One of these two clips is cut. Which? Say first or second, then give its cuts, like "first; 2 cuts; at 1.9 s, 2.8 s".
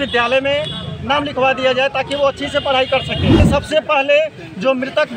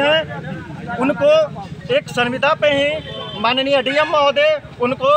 first; 1 cut; at 3.4 s